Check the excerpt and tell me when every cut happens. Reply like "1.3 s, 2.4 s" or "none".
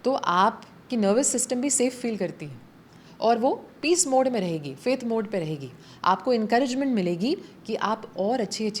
none